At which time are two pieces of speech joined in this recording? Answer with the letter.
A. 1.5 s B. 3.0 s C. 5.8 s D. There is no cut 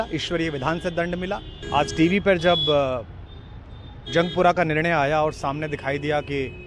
A